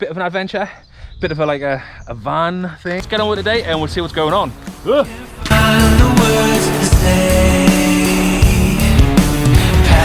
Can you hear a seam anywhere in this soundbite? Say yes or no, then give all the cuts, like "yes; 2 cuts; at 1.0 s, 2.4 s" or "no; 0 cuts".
yes; 1 cut; at 3.0 s